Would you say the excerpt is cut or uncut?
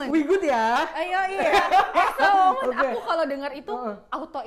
uncut